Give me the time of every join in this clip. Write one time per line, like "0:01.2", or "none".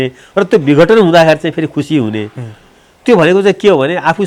none

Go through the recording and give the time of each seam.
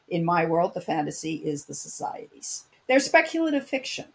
0:02.7

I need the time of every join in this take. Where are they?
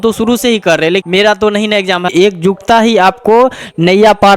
0:01.0
0:02.1

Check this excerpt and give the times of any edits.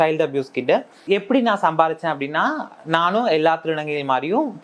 0:01.0

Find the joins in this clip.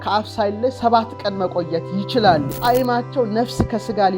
0:02.5

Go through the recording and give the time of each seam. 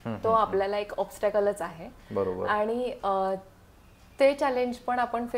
none

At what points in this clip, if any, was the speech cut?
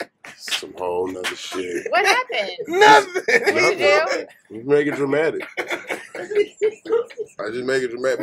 none

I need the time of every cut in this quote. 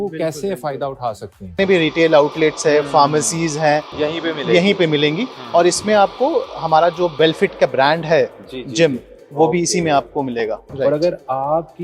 0:01.5
0:10.7

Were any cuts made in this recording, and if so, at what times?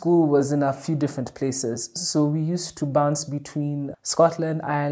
none

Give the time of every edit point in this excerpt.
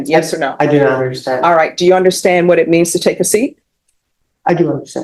none

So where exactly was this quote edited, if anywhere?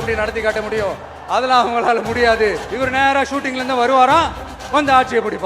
0:02.7

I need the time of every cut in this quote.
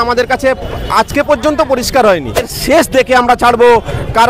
0:02.5

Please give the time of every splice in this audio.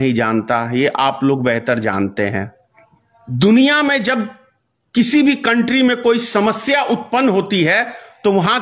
none

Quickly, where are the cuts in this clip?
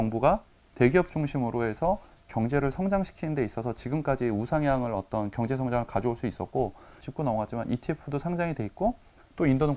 0:07.0

